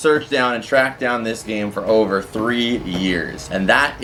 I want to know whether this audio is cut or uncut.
uncut